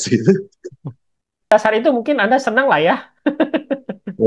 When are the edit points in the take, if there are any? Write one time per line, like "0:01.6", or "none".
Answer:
0:01.5